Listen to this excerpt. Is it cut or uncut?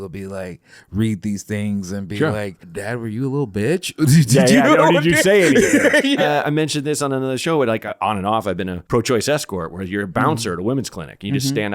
cut